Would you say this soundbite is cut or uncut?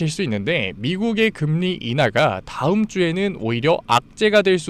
uncut